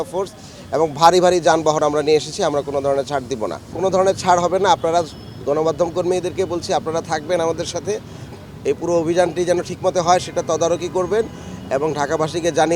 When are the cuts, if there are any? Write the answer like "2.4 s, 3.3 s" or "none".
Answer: 3.7 s

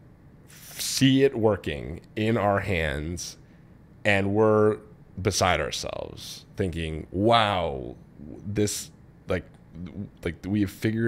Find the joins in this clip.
none

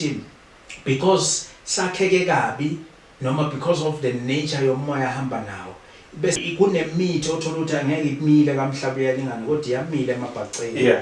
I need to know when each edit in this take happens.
6.4 s

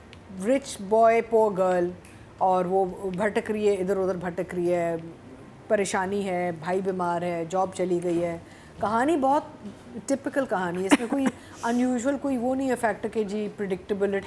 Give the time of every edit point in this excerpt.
none

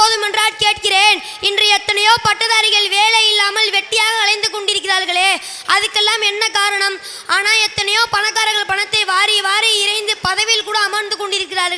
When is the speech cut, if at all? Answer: none

